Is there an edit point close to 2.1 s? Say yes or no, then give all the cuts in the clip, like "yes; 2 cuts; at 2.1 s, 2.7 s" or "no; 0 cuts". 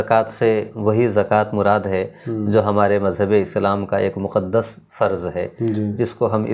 no; 0 cuts